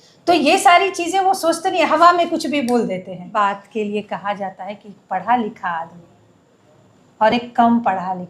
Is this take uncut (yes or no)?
no